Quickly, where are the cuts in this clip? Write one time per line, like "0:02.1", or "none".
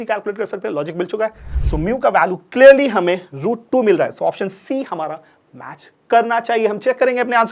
0:01.5